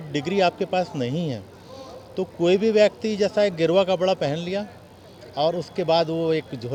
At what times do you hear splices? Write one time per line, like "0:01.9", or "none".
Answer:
none